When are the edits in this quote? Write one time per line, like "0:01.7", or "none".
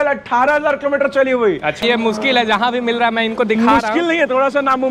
0:01.8